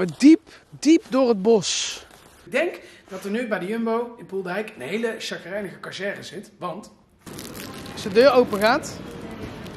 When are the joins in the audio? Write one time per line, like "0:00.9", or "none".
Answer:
0:02.5
0:07.3